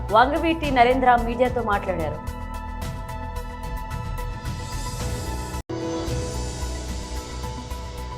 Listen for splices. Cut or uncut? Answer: uncut